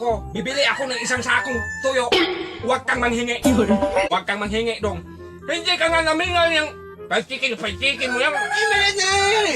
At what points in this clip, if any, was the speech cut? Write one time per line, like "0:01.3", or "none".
0:04.1